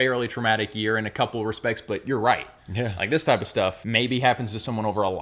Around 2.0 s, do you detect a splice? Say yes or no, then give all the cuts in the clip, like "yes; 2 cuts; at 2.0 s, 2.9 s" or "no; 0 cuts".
no; 1 cut; at 3.8 s